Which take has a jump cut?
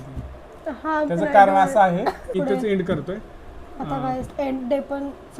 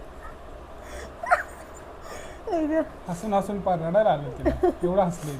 first; 1 cut; at 2.3 s

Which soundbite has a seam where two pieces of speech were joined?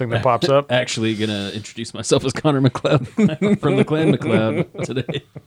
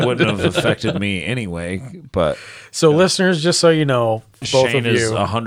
second; 1 cut; at 4.5 s

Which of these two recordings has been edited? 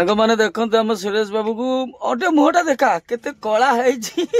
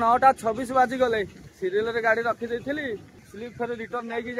second; 1 cut; at 3.1 s

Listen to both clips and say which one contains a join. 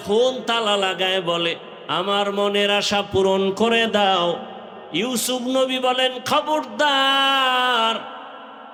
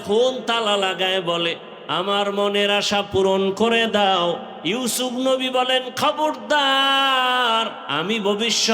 second; 2 cuts; at 4.5 s, 7.8 s

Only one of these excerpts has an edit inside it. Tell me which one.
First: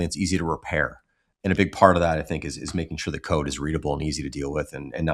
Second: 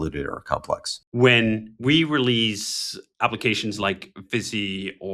second; 1 cut; at 1.0 s

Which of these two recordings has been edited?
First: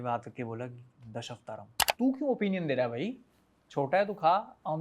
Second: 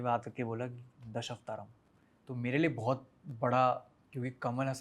first; 1 cut; at 1.8 s

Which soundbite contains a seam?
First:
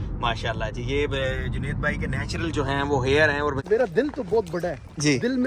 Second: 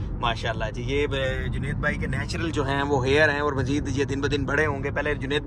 first; 1 cut; at 3.6 s

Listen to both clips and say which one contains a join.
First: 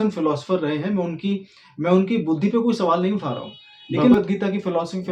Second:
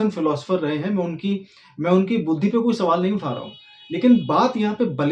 first; 1 cut; at 4.1 s

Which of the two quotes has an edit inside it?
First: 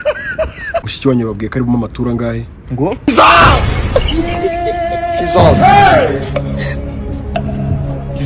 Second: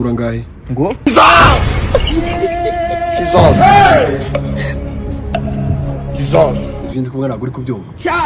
first; 1 cut; at 0.9 s

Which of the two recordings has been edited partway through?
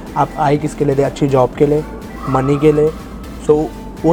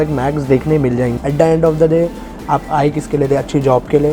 second; 1 cut; at 1.1 s

